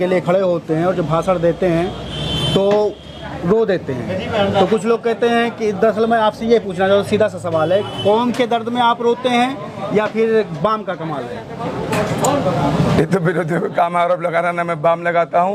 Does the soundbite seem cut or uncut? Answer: uncut